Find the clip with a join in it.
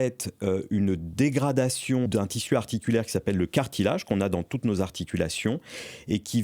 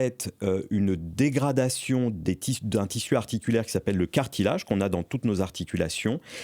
first; 1 cut; at 2.1 s

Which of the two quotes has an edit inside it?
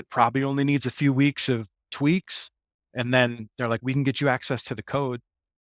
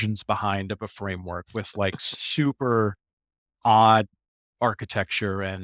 first; 2 cuts; at 1.9 s, 2.8 s

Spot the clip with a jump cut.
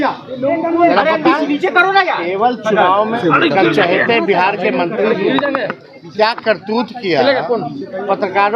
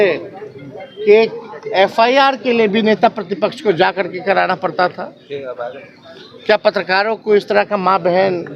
first; 1 cut; at 3.2 s

